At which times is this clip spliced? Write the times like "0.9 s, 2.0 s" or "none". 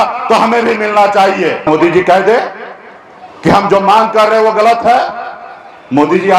1.6 s